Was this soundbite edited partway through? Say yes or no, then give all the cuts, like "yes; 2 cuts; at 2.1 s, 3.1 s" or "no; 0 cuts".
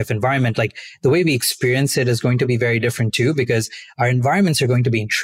no; 0 cuts